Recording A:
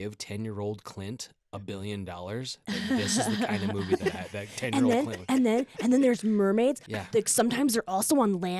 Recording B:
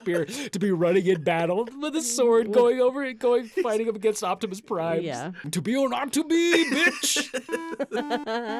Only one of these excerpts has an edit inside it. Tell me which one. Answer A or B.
B